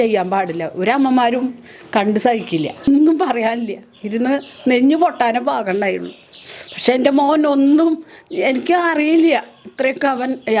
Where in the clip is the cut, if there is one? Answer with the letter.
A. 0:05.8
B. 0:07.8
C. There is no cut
C